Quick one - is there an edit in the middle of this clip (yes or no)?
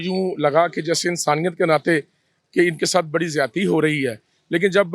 no